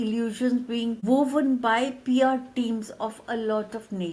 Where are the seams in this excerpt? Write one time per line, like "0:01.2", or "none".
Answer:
0:01.0